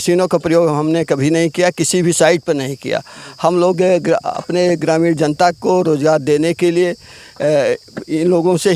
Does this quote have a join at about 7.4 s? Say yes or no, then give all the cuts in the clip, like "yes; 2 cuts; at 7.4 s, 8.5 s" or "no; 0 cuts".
no; 0 cuts